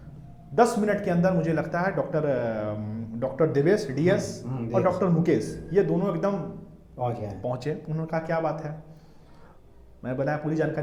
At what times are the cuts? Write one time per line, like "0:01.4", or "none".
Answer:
none